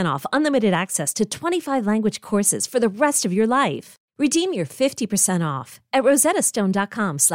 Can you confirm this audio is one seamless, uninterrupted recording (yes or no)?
yes